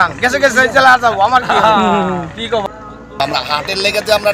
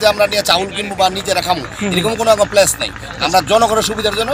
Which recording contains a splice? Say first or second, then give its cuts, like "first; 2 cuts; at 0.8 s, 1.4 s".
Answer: first; 1 cut; at 2.6 s